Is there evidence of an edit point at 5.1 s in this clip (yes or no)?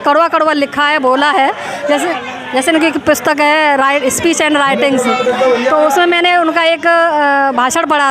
no